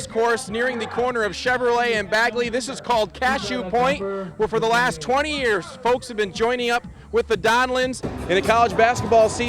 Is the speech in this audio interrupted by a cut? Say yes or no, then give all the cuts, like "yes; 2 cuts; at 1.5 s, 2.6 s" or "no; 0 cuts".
yes; 1 cut; at 8.0 s